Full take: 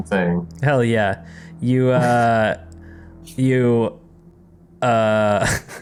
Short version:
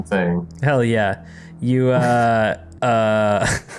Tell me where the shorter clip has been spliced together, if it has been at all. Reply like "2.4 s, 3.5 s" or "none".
2.7 s